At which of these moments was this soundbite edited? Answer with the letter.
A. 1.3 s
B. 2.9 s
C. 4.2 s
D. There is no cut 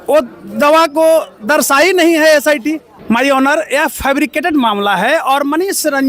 B